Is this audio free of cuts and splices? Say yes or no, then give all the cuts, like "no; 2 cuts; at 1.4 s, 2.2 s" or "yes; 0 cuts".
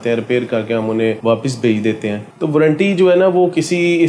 yes; 0 cuts